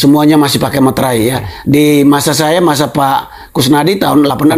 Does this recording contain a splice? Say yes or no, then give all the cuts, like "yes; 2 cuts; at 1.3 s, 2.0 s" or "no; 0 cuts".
no; 0 cuts